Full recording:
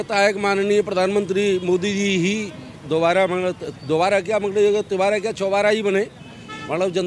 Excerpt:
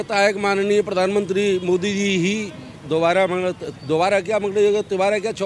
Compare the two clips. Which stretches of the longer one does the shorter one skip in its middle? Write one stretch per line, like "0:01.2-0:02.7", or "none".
none